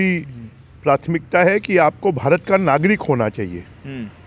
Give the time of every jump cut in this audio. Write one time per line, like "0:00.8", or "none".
none